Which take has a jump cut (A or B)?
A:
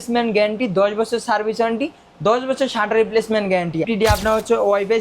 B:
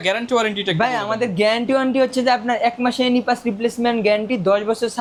A